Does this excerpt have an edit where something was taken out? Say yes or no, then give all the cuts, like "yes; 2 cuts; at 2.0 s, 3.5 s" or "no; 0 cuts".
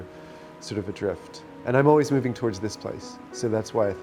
no; 0 cuts